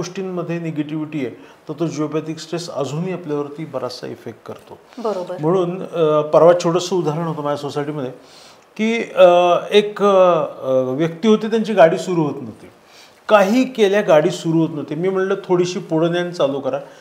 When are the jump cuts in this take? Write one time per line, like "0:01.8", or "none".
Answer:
none